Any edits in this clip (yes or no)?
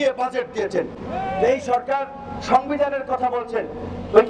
no